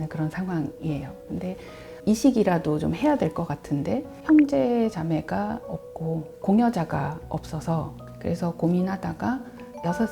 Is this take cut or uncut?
cut